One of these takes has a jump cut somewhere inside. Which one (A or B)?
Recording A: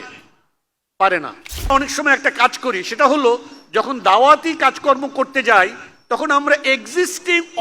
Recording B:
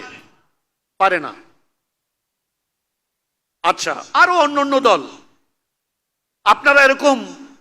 A